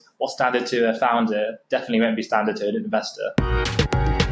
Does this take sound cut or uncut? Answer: cut